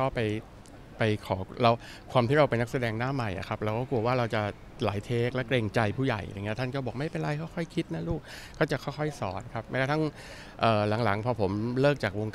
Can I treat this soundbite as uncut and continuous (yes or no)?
yes